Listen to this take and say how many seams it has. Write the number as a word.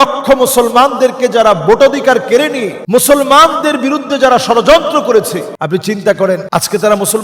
three